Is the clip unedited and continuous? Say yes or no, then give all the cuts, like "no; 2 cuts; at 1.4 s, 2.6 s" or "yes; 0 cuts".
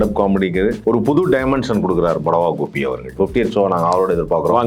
no; 2 cuts; at 0.8 s, 3.1 s